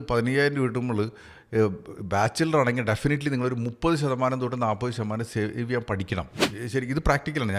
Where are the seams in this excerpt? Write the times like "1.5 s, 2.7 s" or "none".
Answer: 6.4 s